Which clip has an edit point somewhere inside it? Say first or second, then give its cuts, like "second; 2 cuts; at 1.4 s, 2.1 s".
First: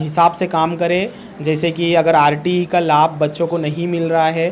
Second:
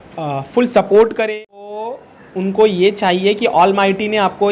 second; 1 cut; at 1.8 s